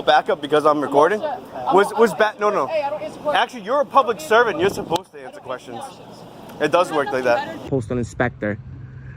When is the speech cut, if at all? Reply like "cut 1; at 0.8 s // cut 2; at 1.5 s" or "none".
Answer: cut 1; at 7.6 s